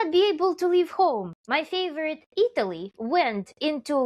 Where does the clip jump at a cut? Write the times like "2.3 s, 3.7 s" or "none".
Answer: 1.4 s